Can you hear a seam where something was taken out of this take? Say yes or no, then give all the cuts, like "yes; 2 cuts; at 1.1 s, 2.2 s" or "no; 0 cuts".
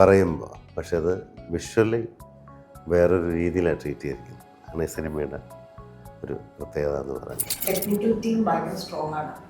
yes; 1 cut; at 7.5 s